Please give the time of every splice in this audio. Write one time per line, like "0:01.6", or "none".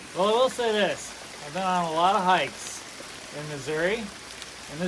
none